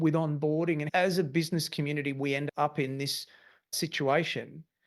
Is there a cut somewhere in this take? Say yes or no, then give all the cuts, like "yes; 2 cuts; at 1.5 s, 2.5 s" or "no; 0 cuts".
yes; 3 cuts; at 0.8 s, 2.4 s, 3.7 s